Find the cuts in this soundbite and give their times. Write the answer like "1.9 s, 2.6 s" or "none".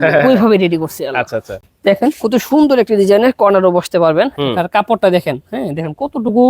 1.6 s